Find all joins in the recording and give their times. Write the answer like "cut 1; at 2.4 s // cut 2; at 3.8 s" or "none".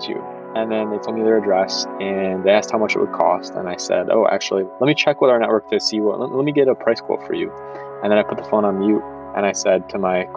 cut 1; at 4.6 s